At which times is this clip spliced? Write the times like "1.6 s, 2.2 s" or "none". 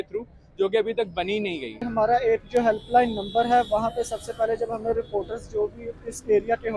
1.9 s